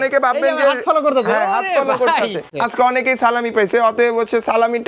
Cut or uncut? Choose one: cut